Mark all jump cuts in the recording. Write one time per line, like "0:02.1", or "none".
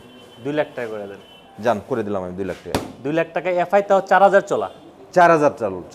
none